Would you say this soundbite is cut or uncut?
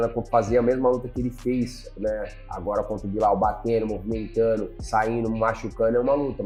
uncut